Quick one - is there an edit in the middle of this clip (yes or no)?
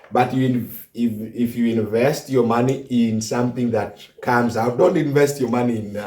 no